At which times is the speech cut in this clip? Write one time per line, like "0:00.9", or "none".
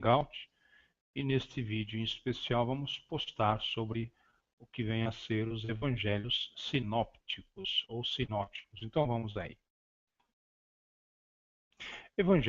0:08.4